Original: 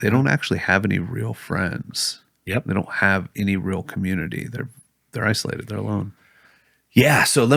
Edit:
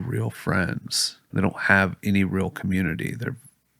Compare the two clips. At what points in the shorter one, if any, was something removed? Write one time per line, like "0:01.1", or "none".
0:01.3